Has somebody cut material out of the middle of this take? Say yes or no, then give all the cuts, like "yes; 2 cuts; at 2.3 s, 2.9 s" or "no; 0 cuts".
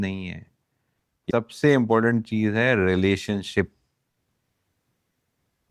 yes; 1 cut; at 1.2 s